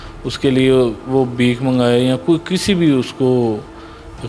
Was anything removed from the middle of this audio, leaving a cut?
no; 0 cuts

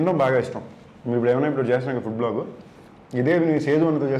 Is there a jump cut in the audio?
no; 0 cuts

